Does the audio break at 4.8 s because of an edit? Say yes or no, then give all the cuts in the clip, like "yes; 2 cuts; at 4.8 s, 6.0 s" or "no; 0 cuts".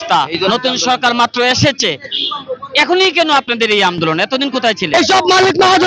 yes; 1 cut; at 4.8 s